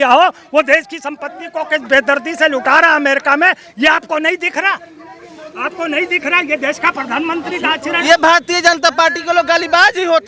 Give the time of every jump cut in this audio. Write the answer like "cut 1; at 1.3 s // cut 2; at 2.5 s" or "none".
cut 1; at 8.0 s